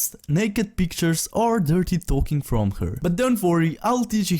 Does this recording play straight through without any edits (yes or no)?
no